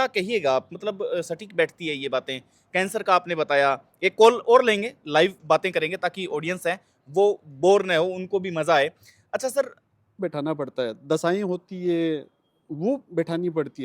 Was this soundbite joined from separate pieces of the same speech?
yes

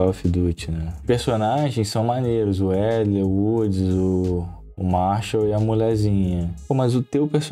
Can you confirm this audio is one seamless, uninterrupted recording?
no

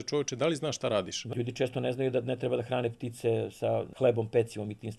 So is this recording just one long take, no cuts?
no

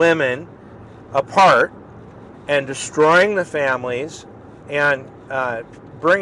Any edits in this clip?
no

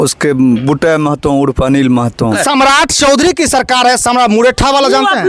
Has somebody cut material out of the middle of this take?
yes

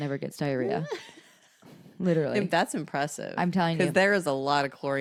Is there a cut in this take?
no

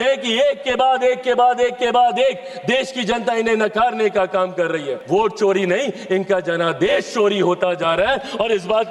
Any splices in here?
yes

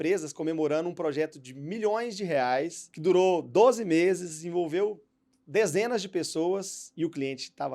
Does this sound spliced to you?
yes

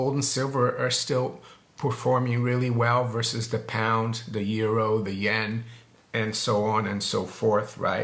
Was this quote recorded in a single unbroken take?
yes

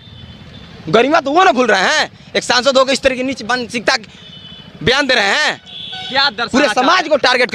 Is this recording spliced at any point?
no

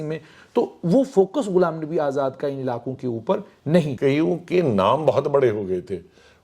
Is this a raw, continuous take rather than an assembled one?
no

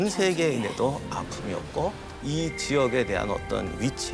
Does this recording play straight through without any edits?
no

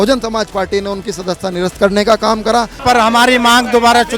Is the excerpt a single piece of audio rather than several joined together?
no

